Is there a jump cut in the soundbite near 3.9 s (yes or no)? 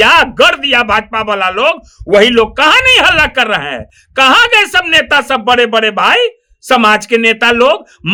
no